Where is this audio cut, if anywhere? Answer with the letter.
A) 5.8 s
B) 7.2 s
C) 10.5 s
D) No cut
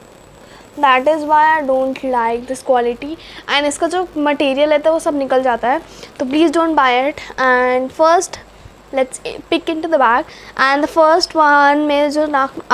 D